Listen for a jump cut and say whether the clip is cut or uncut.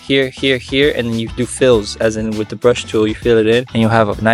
uncut